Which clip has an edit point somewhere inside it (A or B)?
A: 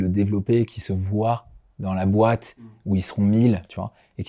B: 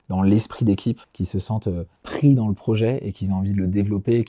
B